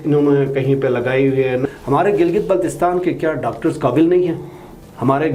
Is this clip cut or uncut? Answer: cut